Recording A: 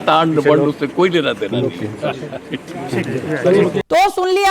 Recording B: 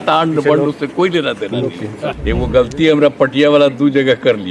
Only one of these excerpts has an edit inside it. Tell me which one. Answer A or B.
B